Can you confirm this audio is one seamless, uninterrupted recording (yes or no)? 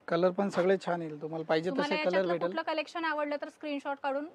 yes